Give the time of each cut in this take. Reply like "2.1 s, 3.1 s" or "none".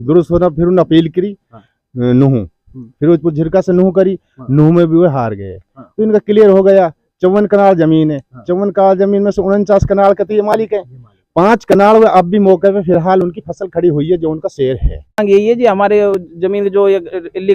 15.2 s

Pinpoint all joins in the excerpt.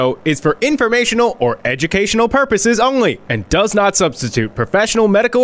none

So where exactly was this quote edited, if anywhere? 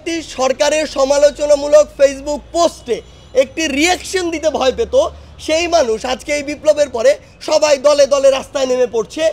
none

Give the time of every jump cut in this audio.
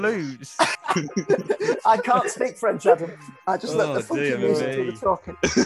none

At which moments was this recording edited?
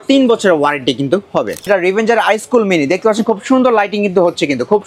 1.7 s

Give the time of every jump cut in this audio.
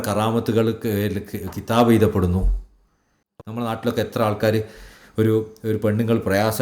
3.6 s

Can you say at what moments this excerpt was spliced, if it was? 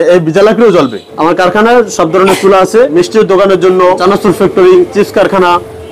1.0 s, 2.9 s, 4.0 s

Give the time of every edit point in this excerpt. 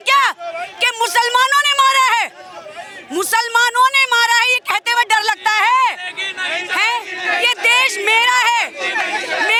none

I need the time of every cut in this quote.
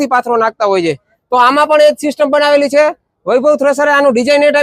none

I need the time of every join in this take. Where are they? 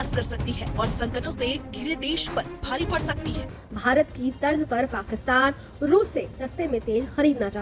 3.5 s

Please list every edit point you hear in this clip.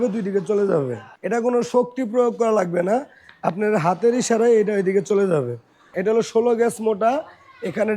1.1 s, 5.9 s

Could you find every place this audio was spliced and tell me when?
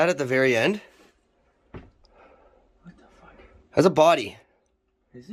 none

